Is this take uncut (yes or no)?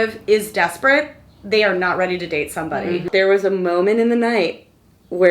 no